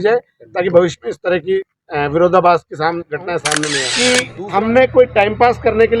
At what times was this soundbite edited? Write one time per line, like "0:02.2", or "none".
0:03.9